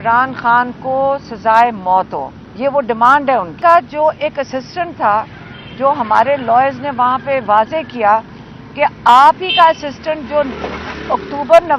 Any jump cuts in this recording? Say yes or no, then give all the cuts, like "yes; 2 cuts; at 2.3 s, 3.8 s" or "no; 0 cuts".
yes; 1 cut; at 3.5 s